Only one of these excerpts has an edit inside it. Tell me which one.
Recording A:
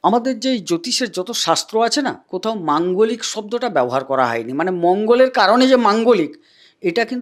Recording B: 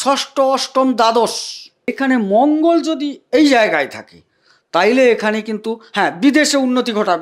B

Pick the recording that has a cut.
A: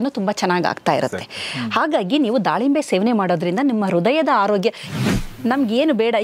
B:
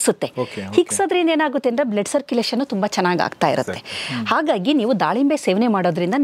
A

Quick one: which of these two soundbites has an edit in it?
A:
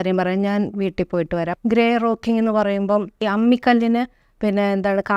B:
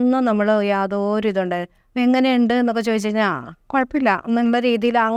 A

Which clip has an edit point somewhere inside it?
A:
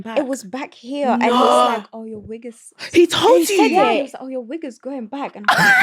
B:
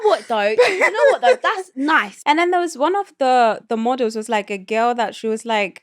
B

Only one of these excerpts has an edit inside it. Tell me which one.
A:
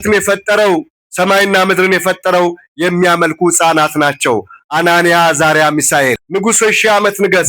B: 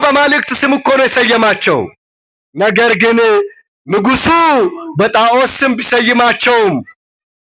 A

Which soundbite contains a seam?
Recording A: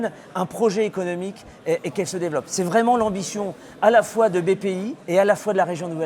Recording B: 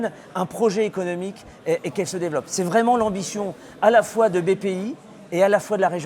A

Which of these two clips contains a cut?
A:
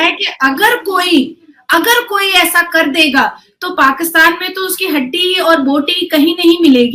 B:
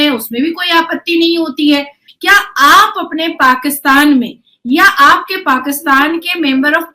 B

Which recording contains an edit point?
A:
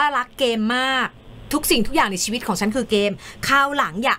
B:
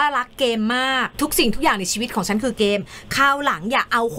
B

